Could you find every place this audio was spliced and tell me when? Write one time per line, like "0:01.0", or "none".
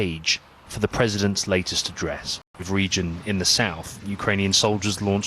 0:02.7